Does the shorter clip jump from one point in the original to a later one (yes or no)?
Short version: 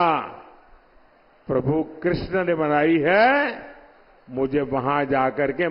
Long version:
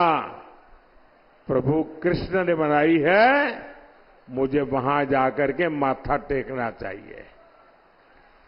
no